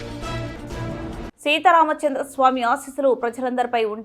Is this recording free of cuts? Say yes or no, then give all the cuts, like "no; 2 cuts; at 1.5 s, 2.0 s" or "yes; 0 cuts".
no; 1 cut; at 1.3 s